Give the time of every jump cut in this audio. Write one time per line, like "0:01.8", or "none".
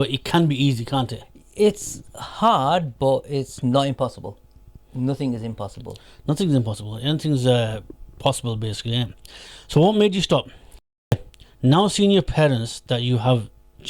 0:11.1